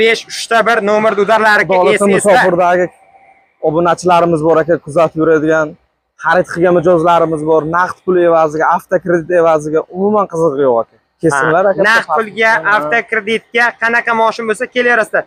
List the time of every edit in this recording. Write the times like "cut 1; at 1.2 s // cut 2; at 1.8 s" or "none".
none